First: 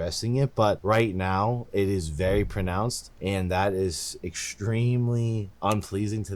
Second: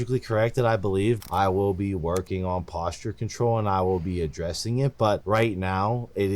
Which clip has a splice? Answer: second; 1 cut; at 1.2 s

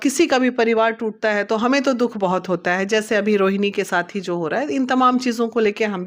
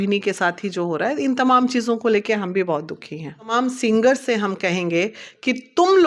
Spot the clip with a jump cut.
second; 1 cut; at 3.5 s

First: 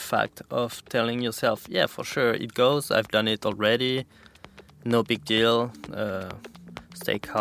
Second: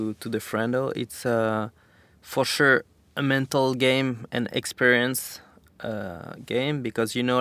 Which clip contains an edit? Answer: second; 1 cut; at 3.0 s

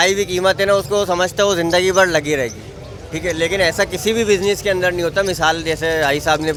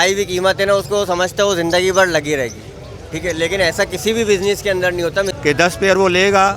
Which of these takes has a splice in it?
second; 1 cut; at 5.3 s

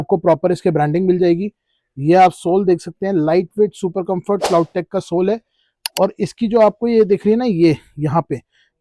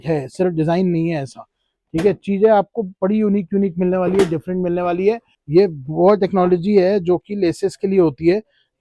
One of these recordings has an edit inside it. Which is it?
second; 1 cut; at 5.3 s

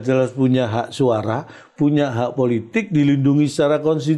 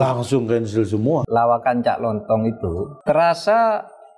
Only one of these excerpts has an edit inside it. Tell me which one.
second; 2 cuts; at 1.2 s, 2.9 s

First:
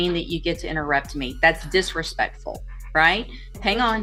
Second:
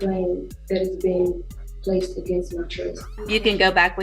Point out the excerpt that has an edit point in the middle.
second; 1 cut; at 3.1 s

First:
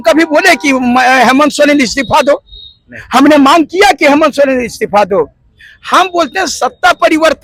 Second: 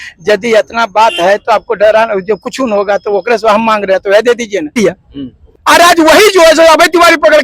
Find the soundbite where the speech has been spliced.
second; 1 cut; at 4.8 s

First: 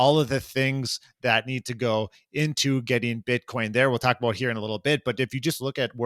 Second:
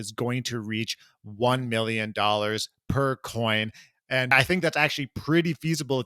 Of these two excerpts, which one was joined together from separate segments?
second; 1 cut; at 4.3 s

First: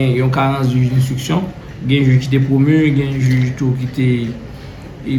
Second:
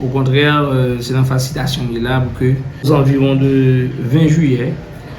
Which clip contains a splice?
second; 1 cut; at 2.9 s

